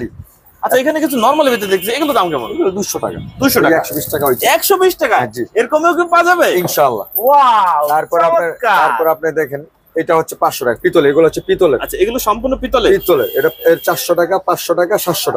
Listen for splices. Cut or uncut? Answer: uncut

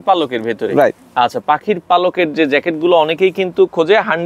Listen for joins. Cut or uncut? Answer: uncut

